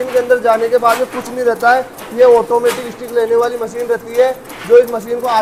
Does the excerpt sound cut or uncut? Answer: uncut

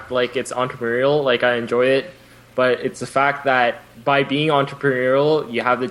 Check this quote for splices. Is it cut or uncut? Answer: cut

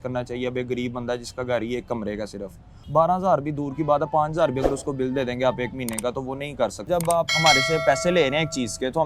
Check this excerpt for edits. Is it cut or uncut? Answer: cut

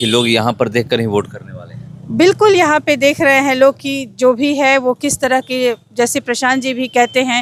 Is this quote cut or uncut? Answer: uncut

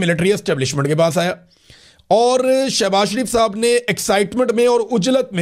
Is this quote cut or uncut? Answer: uncut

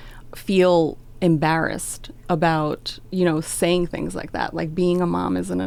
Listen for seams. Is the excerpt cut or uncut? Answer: uncut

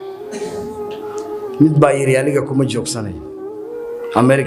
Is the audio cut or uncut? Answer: cut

